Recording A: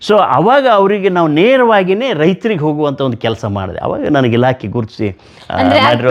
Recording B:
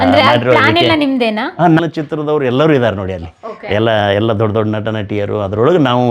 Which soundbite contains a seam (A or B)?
B